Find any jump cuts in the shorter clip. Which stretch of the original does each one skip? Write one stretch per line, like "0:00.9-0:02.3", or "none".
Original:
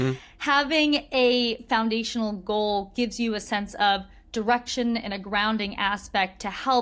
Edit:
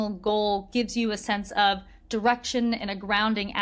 none